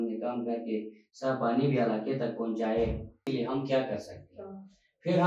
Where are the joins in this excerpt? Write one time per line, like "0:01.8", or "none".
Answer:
0:03.3

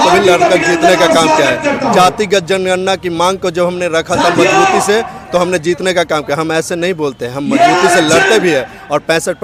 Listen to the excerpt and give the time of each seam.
none

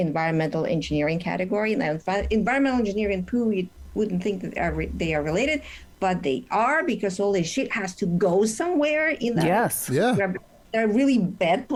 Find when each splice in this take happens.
none

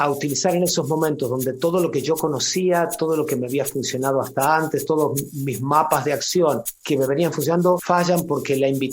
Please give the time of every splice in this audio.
0:06.7
0:07.8

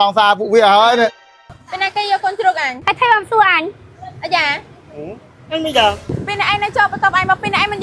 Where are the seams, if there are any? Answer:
0:01.2
0:02.7
0:06.1

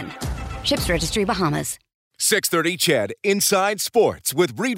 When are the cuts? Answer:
0:02.0

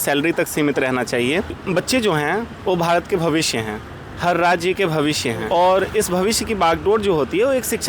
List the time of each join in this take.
0:01.6
0:05.4

